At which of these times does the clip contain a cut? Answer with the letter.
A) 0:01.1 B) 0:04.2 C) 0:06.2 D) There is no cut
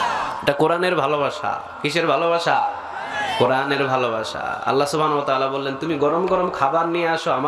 D